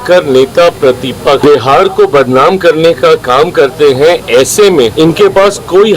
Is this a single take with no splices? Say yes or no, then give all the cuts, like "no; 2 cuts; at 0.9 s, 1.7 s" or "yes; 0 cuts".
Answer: no; 2 cuts; at 1.4 s, 4.9 s